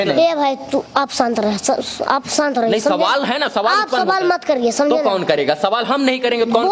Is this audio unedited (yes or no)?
yes